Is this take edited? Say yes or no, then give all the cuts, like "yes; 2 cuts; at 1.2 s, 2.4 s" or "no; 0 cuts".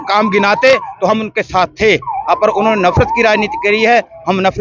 no; 0 cuts